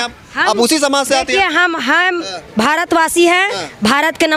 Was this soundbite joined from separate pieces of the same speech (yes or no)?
no